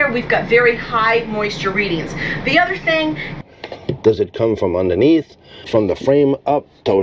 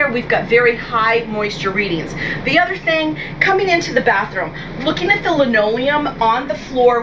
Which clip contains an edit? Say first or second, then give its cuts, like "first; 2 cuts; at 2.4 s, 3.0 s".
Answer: first; 2 cuts; at 3.3 s, 5.6 s